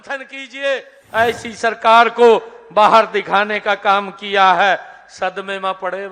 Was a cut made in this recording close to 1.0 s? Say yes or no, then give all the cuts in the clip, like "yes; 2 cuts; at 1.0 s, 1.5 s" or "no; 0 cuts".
yes; 1 cut; at 1.0 s